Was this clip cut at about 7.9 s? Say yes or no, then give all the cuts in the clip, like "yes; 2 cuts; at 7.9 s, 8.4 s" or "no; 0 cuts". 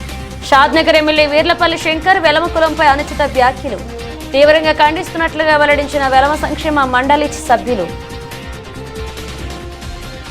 yes; 1 cut; at 7.9 s